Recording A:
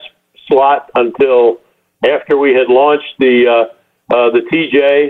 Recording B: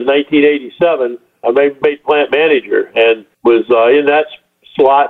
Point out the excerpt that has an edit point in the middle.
B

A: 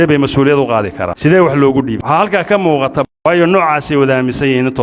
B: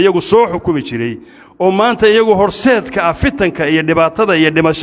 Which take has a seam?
A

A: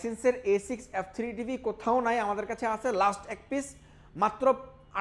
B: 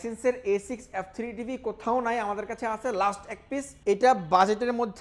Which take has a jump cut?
B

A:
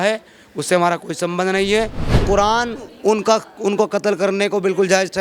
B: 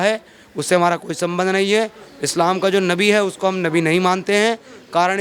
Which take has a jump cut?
A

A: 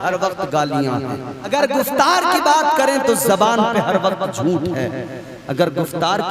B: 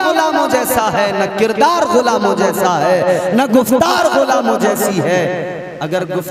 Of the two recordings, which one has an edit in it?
A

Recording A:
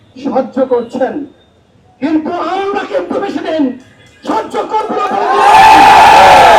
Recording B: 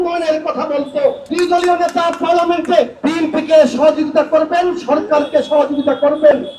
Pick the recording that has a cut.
B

